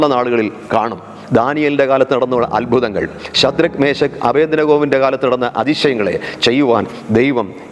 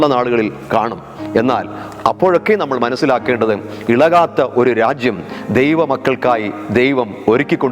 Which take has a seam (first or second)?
first